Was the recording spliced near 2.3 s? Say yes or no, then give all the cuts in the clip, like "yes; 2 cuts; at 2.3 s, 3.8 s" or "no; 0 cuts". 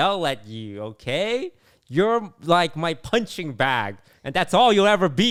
no; 0 cuts